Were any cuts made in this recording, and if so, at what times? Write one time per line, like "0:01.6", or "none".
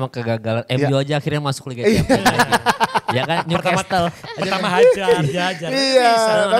none